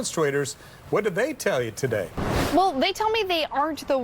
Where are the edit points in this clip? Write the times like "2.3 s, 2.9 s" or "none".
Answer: 2.2 s